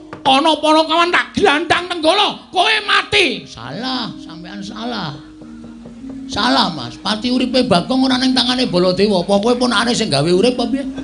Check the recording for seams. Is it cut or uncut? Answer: uncut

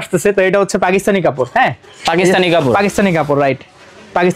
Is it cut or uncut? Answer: uncut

